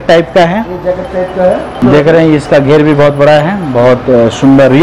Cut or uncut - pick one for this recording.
cut